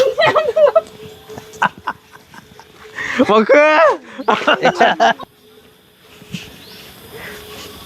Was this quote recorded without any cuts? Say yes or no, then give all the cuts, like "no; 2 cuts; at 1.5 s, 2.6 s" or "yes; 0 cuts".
no; 1 cut; at 5.2 s